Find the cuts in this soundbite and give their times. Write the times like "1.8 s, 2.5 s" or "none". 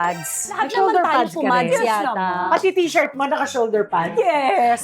2.4 s

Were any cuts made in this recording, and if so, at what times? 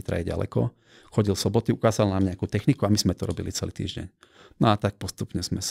none

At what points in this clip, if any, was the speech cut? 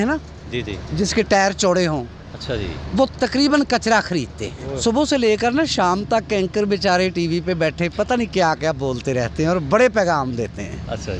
4.6 s

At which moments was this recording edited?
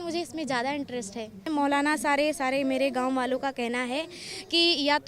1.5 s

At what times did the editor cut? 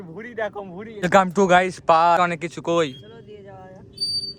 0.9 s, 2.2 s

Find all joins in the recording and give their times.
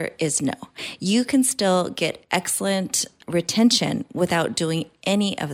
none

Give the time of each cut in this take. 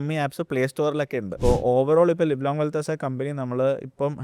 1.3 s

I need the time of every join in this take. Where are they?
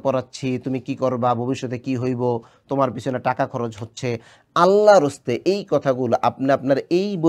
none

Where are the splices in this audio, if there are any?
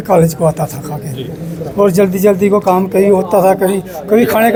none

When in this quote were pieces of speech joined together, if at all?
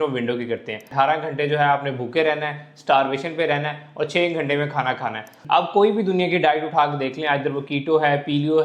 0.9 s, 5.3 s

